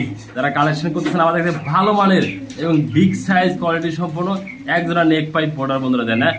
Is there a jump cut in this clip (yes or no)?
no